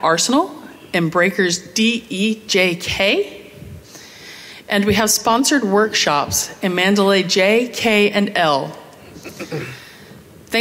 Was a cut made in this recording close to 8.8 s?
yes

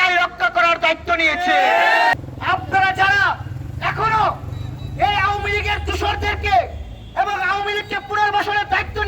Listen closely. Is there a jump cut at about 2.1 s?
yes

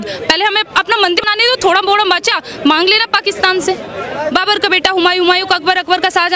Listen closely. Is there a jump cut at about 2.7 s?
no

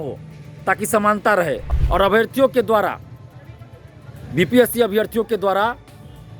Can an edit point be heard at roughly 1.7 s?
yes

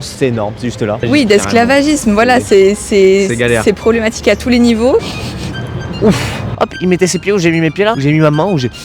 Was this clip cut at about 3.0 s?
no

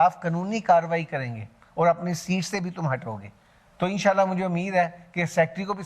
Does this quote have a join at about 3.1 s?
no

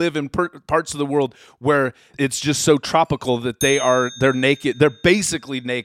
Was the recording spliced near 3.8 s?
no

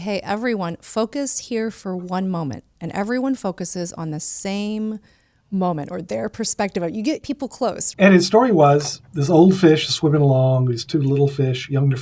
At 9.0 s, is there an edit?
yes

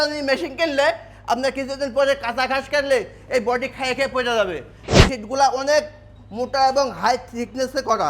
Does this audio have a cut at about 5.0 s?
yes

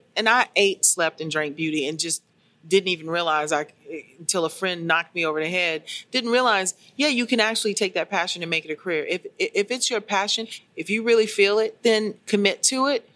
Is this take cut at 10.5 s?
yes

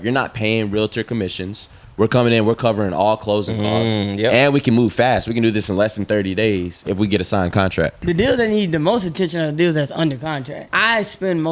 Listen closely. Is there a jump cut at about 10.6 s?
yes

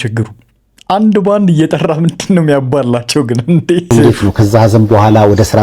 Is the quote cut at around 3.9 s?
yes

